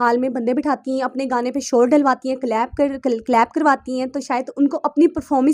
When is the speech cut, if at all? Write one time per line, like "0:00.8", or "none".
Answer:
none